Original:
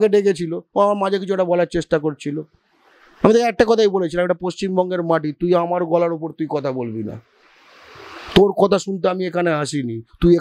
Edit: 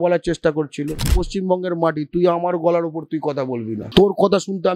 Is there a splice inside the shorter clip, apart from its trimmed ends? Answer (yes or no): yes